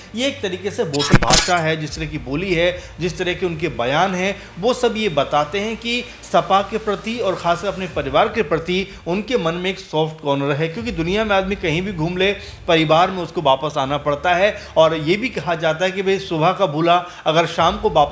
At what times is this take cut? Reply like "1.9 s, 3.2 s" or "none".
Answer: 1.1 s

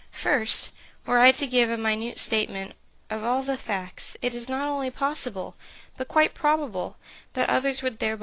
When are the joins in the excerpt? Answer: 4.4 s

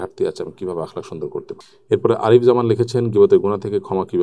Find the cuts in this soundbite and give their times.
1.5 s

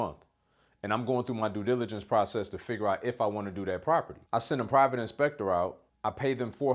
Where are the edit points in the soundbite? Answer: 4.2 s, 5.9 s

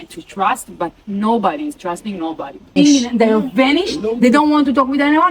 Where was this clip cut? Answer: 2.8 s

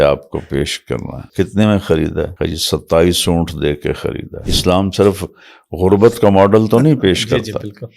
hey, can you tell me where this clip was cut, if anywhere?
1.2 s, 2.3 s, 4.4 s

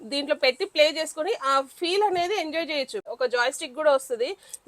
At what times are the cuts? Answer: 3.1 s

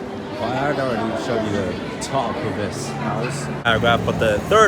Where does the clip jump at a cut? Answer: 3.6 s

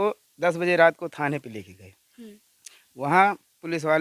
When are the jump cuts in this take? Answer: none

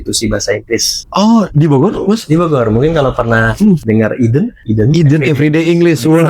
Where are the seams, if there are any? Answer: 1.0 s, 3.8 s, 4.6 s

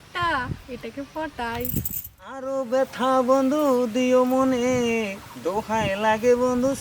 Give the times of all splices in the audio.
2.5 s

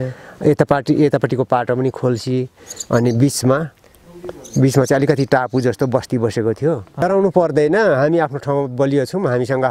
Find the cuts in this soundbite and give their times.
7.0 s

